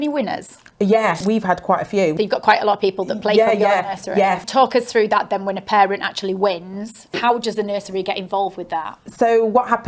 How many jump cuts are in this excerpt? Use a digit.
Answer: 4